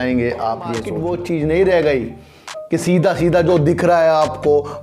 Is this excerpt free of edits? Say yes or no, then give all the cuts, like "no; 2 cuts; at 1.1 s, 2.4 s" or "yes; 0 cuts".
no; 1 cut; at 0.9 s